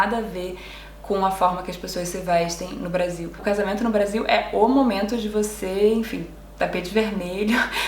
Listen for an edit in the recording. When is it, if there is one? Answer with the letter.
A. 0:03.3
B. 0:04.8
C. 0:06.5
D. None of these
A